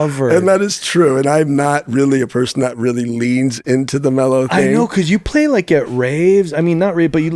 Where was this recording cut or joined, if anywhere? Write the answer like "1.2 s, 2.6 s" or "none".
none